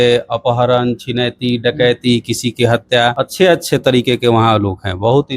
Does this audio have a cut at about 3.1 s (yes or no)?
yes